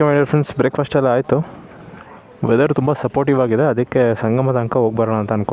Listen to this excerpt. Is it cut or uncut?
uncut